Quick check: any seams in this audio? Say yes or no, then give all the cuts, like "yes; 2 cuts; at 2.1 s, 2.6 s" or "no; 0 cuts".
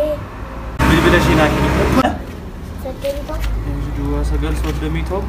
no; 0 cuts